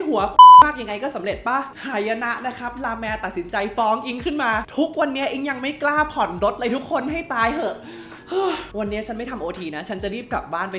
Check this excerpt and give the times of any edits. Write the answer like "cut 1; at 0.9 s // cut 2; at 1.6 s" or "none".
cut 1; at 1.7 s // cut 2; at 4.6 s // cut 3; at 8.7 s